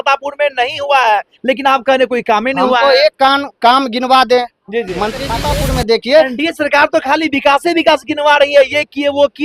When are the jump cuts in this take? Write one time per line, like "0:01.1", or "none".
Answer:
0:05.4